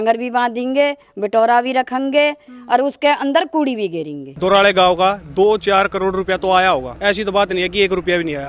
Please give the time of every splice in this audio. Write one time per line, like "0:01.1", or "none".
0:04.3